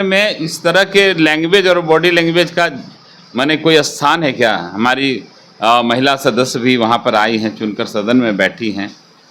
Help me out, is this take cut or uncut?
uncut